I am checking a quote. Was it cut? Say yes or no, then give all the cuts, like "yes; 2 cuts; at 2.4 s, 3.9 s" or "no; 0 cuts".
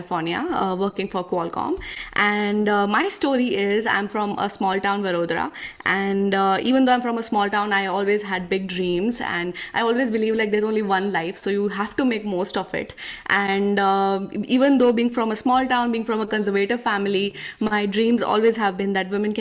no; 0 cuts